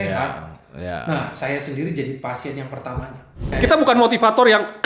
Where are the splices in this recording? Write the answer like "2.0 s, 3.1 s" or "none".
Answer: 3.5 s